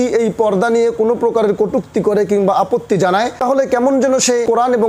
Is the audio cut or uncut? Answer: uncut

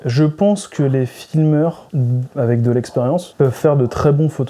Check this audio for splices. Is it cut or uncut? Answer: cut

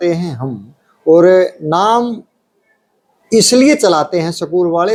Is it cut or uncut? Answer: uncut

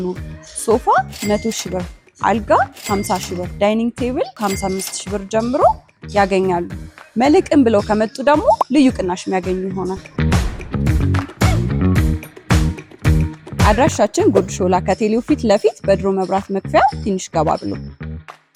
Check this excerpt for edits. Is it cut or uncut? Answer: uncut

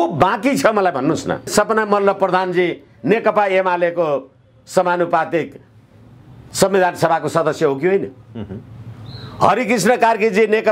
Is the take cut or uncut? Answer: cut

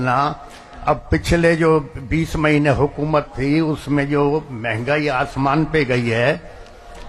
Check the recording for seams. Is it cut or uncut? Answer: uncut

